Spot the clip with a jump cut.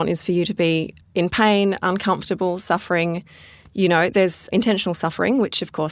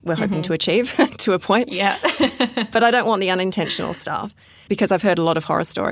first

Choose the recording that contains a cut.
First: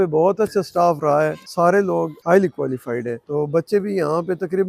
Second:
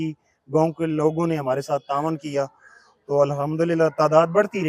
first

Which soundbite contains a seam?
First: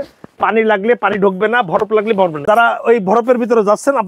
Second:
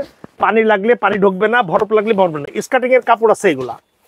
first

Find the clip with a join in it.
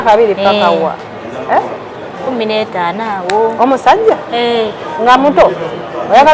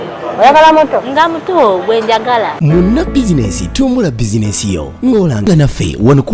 second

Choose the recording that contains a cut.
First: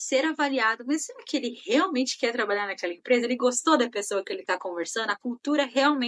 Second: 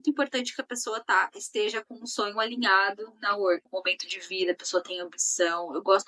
second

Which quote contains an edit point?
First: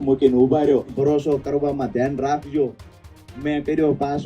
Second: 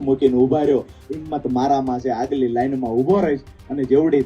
first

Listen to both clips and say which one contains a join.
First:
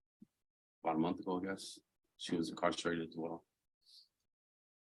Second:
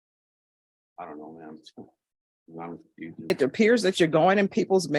second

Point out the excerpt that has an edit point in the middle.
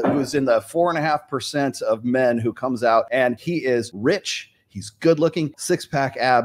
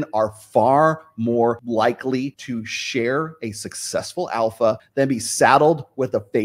first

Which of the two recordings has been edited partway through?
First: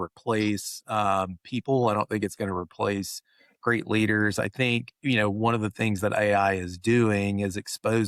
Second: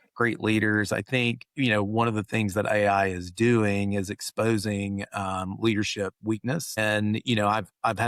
second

